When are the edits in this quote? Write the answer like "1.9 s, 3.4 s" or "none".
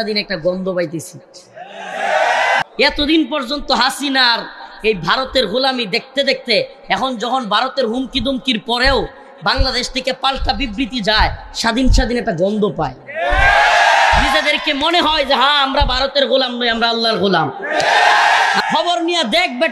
2.6 s, 18.6 s